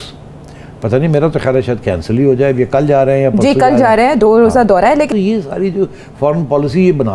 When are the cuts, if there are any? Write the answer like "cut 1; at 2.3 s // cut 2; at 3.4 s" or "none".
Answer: cut 1; at 5.1 s